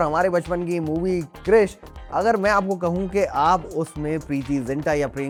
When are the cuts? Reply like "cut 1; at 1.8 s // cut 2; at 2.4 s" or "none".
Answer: none